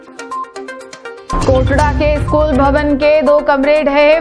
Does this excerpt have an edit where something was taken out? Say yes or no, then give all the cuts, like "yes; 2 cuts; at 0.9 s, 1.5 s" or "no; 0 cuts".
yes; 1 cut; at 1.3 s